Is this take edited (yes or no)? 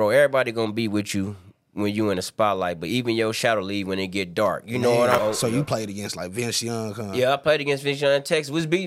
yes